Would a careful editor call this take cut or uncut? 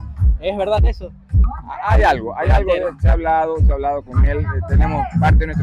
uncut